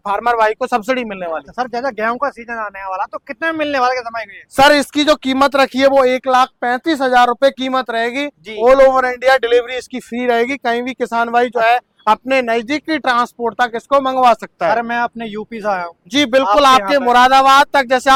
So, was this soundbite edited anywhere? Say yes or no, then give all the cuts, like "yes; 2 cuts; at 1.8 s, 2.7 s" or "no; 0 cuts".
no; 0 cuts